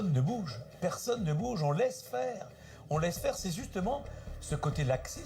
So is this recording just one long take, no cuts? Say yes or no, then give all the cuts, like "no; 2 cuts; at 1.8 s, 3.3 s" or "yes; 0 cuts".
yes; 0 cuts